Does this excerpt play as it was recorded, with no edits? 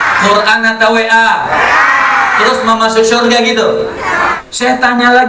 no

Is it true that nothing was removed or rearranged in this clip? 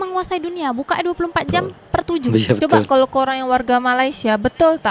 yes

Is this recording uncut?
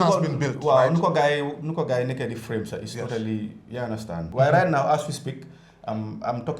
no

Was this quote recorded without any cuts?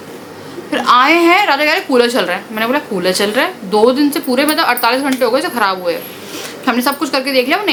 yes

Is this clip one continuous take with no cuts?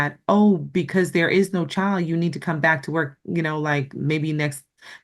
yes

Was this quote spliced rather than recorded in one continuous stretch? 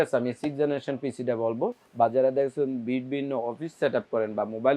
no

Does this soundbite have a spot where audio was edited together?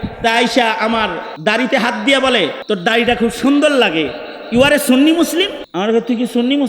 yes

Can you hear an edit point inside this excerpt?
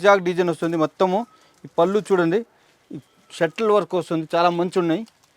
no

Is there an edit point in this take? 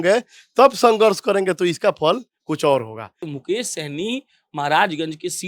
yes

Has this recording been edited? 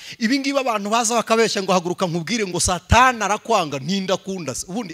no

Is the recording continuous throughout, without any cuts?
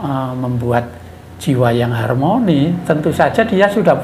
yes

